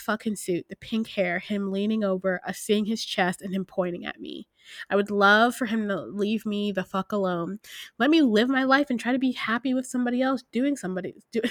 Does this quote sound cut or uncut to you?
uncut